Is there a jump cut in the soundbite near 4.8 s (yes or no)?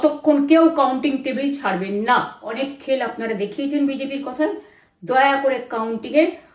no